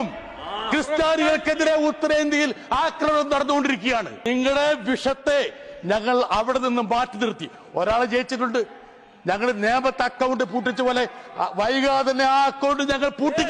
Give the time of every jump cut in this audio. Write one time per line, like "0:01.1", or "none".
0:04.3